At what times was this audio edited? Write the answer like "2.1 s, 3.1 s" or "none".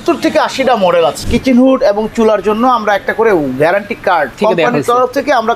1.2 s, 4.3 s

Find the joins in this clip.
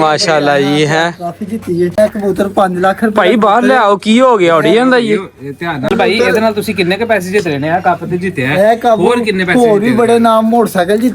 1.9 s, 5.9 s

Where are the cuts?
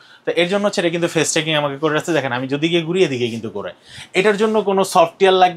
none

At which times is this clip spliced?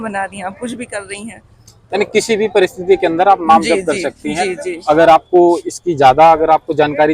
none

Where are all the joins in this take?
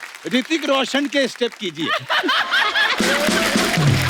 3.0 s

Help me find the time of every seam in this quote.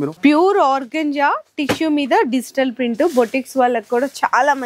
none

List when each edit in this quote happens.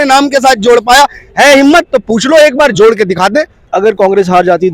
3.6 s

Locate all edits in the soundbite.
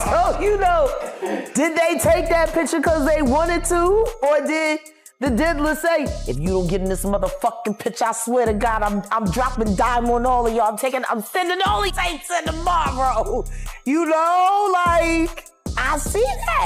11.9 s

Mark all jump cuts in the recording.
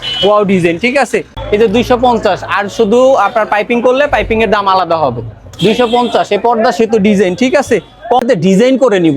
1.4 s, 8.2 s

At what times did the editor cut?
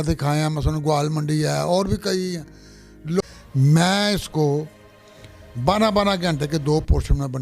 3.2 s

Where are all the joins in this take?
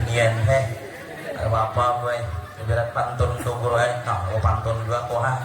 none

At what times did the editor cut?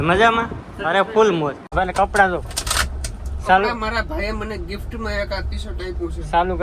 1.6 s

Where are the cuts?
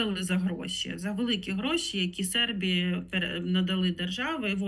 none

